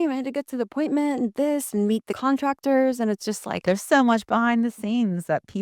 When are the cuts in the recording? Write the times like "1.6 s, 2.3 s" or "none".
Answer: 2.1 s, 3.6 s